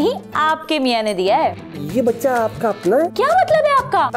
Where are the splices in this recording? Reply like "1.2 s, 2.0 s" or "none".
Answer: 1.5 s, 3.1 s